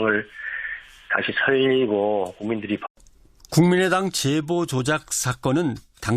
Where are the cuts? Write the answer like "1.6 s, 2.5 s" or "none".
none

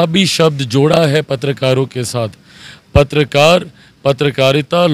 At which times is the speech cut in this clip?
none

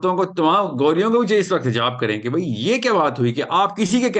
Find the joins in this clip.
none

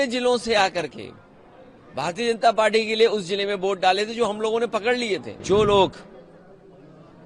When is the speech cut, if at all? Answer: 5.3 s

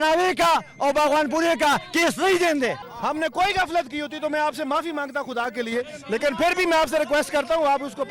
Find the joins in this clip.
2.9 s

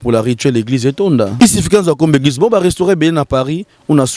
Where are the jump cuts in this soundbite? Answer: 1.3 s

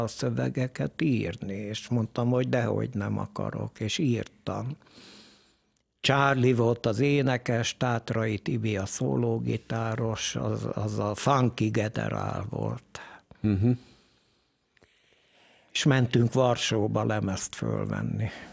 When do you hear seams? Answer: none

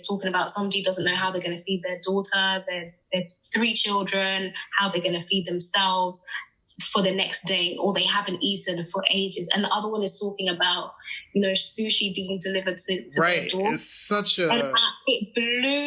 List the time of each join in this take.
none

